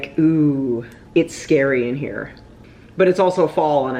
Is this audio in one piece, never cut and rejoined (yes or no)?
no